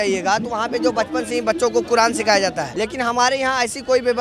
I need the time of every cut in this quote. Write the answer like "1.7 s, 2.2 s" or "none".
2.7 s

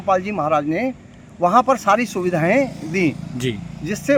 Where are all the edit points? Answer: none

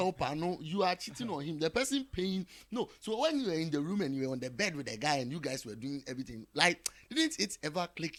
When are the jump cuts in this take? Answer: none

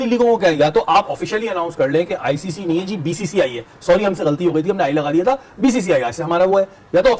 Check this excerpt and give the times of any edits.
none

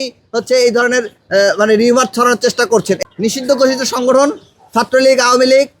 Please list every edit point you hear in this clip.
3.0 s

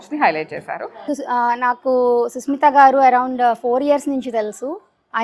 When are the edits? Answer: 1.1 s

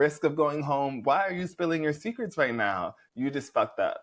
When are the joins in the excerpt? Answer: 3.0 s

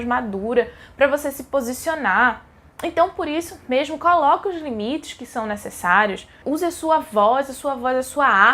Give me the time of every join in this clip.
6.4 s

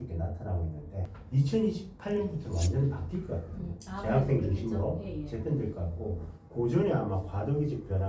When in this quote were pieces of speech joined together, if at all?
1.2 s

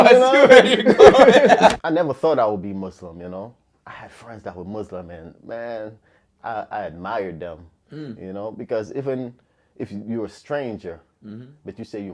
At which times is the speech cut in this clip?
1.7 s

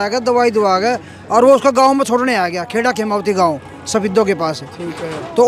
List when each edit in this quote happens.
none

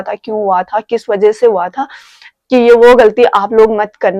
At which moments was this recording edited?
none

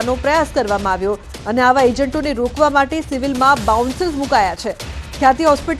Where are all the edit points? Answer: 3.8 s

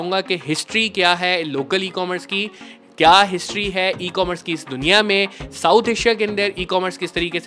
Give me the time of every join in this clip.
none

